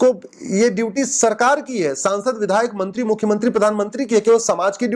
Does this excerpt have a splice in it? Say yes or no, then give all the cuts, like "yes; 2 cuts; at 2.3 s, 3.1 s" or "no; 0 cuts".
no; 0 cuts